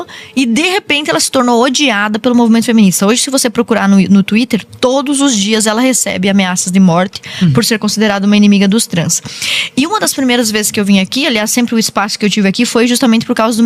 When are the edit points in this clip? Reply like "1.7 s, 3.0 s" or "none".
none